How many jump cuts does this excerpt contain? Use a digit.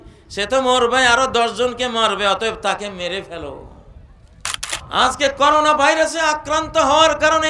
1